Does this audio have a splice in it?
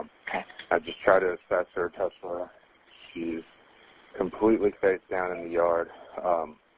no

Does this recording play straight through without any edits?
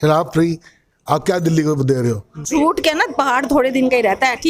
no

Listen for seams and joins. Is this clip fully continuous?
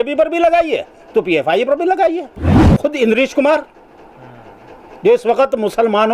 no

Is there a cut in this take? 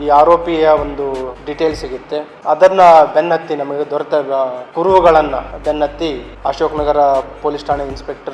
yes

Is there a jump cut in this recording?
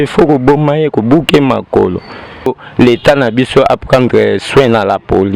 yes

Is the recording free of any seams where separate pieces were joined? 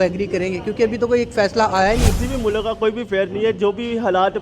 no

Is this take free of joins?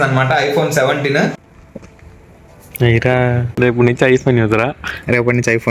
no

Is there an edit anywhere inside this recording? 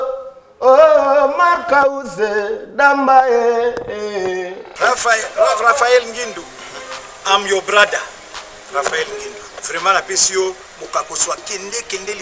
yes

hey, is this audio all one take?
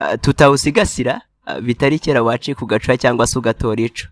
yes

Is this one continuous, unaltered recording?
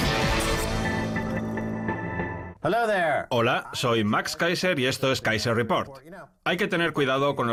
yes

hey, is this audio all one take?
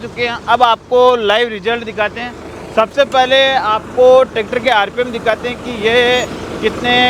yes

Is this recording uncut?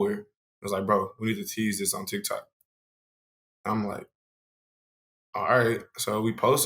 yes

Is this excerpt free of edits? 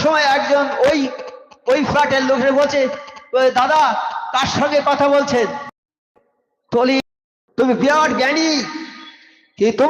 no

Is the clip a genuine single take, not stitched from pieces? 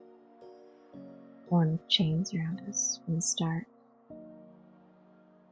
yes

